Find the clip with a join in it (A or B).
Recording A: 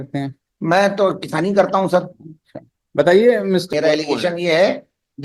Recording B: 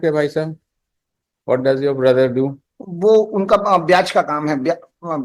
A